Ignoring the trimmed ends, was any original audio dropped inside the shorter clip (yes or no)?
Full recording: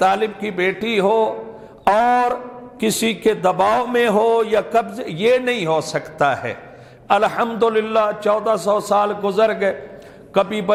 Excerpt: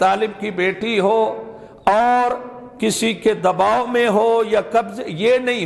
no